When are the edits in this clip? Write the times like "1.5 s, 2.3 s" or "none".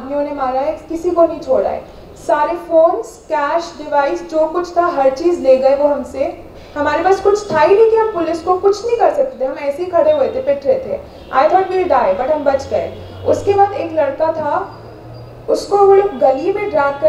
none